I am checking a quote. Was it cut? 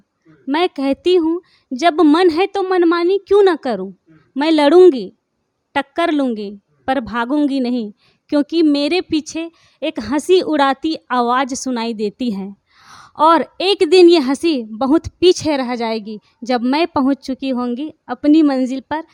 no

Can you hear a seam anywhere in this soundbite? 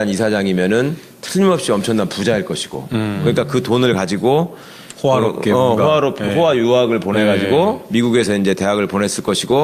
no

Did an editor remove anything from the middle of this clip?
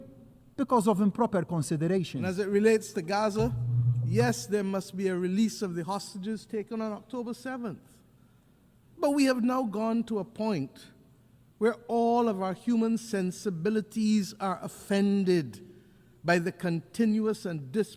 yes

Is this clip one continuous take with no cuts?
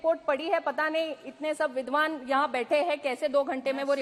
yes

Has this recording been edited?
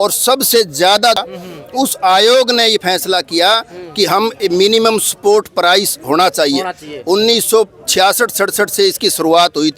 yes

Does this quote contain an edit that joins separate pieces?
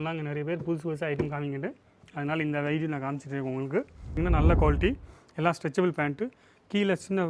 yes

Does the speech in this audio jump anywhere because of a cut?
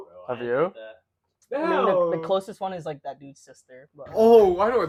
no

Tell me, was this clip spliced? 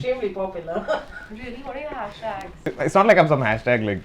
yes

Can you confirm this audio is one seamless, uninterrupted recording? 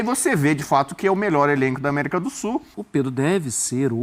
no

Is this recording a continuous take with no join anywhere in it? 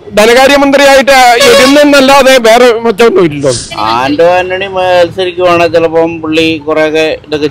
no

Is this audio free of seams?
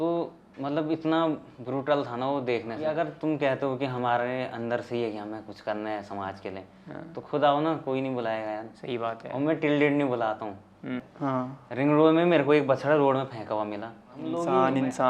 no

